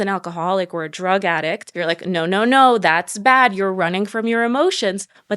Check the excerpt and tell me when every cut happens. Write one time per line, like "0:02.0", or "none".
0:01.7